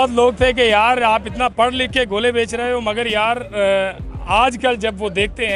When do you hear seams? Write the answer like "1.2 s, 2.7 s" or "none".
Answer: none